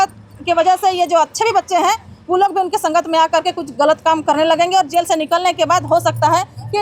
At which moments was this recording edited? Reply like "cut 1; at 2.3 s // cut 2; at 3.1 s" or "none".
none